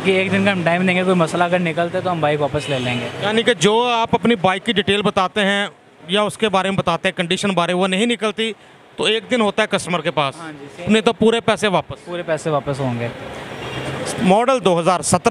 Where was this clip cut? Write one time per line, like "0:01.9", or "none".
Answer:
0:13.9